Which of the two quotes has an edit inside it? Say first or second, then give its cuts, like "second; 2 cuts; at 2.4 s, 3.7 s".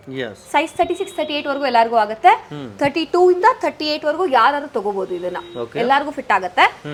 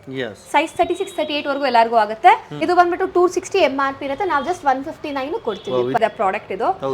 second; 2 cuts; at 2.5 s, 6.0 s